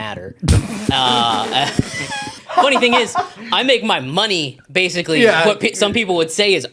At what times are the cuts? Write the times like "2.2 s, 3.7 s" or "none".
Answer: 2.4 s